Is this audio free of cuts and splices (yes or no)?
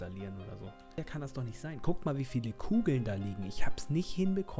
no